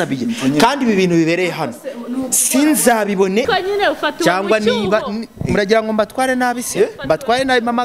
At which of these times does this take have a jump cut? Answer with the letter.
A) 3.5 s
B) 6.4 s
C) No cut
A